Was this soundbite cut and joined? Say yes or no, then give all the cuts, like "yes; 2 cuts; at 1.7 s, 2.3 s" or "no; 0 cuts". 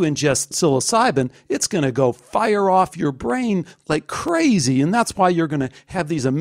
no; 0 cuts